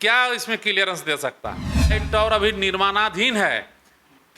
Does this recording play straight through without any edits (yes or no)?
no